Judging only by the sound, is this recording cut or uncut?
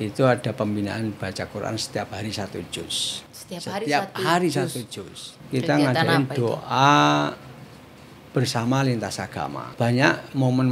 cut